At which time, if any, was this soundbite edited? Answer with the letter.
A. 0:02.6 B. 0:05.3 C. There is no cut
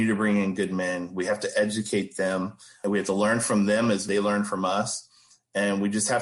C